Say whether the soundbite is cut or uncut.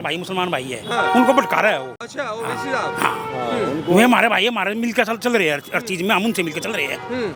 uncut